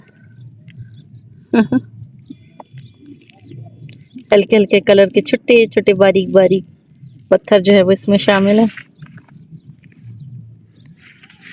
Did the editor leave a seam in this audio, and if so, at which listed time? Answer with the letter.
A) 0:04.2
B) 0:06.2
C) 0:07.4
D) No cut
D